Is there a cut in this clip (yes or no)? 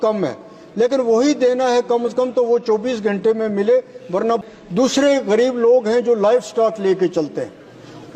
yes